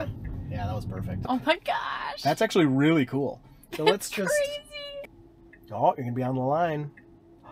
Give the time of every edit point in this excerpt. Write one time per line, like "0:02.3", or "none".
0:01.3
0:04.9